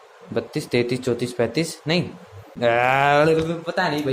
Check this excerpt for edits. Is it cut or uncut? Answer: cut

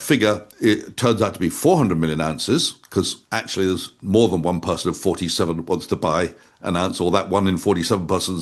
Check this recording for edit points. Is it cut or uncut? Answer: uncut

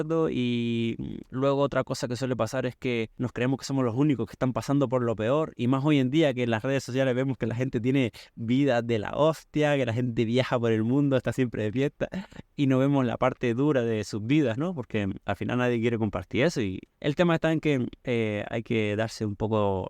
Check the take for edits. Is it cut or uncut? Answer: cut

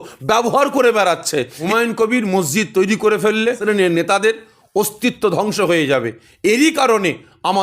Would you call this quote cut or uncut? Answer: cut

